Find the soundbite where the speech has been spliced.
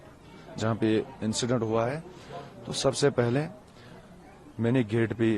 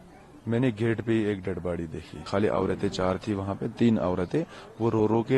second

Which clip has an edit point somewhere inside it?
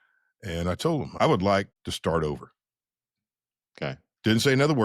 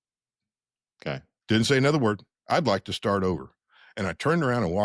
first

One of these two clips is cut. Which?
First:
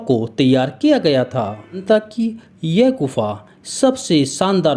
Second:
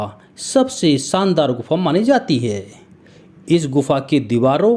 first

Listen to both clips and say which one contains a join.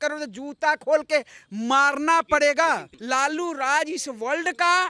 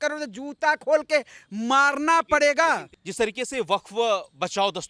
first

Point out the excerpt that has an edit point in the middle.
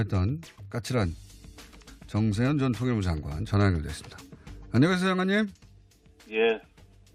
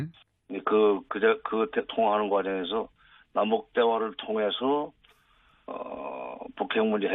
second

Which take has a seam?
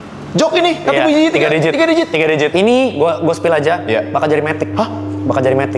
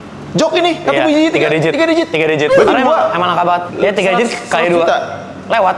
first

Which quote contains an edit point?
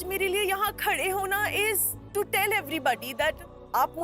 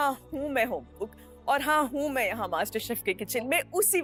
first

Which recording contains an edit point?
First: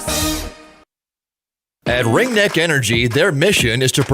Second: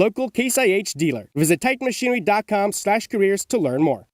first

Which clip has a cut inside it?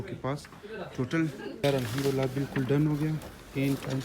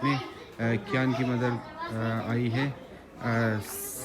first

